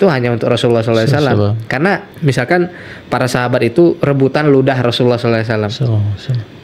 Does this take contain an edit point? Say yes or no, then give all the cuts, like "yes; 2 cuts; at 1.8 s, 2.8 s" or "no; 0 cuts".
yes; 1 cut; at 2.1 s